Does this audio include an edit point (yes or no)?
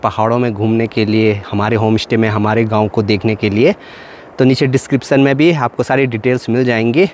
no